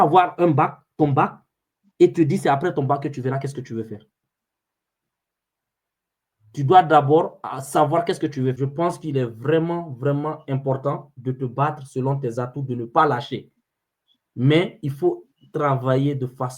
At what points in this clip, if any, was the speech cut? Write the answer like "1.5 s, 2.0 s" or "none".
8.6 s